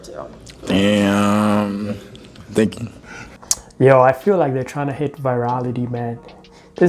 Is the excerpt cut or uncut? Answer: uncut